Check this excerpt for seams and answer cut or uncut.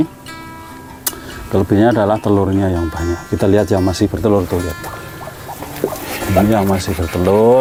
uncut